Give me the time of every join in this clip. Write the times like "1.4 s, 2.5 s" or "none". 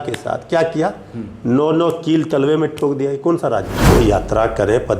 3.7 s